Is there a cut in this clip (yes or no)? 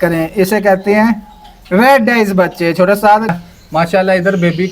yes